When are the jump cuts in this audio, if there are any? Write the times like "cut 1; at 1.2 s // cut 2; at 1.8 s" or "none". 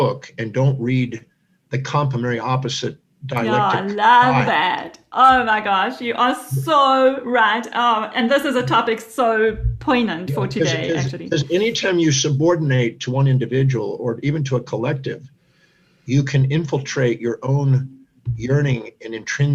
none